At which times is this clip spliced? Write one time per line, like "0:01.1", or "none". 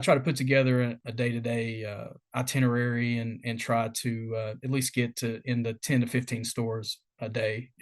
0:01.0